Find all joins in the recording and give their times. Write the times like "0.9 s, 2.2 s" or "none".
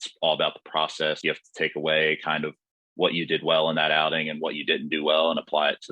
1.2 s